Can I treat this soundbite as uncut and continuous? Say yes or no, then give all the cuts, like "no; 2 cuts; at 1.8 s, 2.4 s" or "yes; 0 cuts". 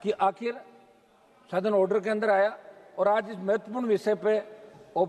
yes; 0 cuts